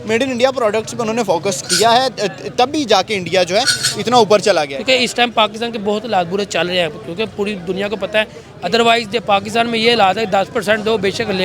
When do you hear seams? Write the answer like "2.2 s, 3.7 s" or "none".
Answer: 4.8 s, 8.4 s